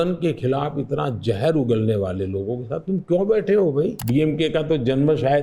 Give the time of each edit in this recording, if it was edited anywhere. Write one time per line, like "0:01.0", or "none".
0:04.0